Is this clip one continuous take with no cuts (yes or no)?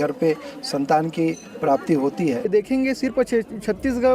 no